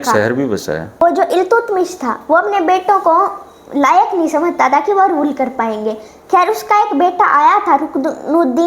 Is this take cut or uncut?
cut